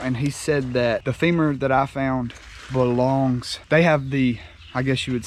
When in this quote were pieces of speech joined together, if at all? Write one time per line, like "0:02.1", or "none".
0:01.1
0:03.5